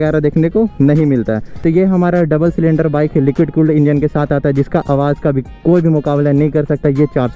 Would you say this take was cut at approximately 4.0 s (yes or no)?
no